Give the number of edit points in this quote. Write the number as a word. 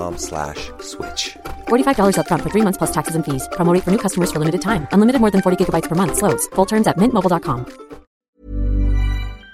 one